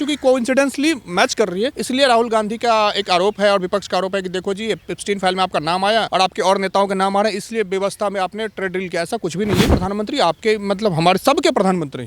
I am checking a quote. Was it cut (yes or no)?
yes